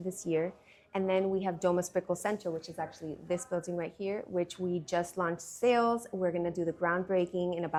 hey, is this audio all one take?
yes; 0 cuts

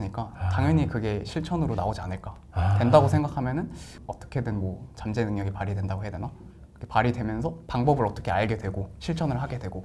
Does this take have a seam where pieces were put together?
yes; 1 cut; at 3.9 s

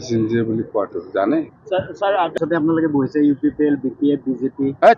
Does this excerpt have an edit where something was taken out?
yes; 1 cut; at 2.4 s

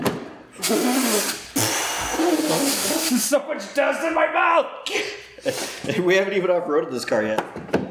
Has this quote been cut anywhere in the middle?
no; 0 cuts

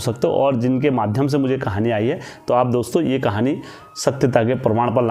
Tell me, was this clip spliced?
no; 0 cuts

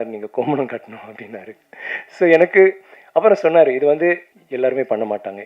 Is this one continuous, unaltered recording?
no; 1 cut; at 4.4 s

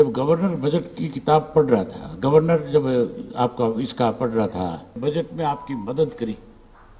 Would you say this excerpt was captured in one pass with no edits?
no; 1 cut; at 5.0 s

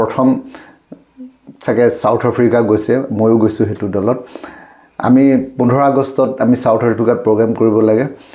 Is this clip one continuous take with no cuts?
yes; 0 cuts

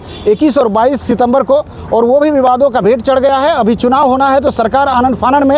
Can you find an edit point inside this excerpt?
no; 0 cuts

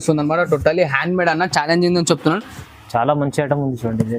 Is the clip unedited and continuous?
no; 1 cut; at 2.6 s

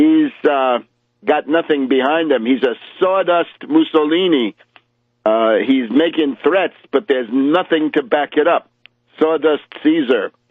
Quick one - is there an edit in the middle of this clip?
yes; 1 cut; at 7.0 s

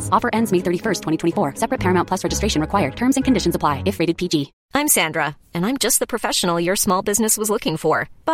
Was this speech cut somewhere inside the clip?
yes; 1 cut; at 4.6 s

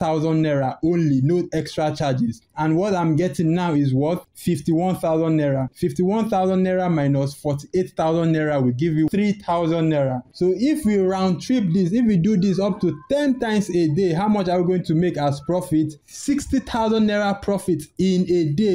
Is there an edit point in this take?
yes; 2 cuts; at 9.1 s, 10.3 s

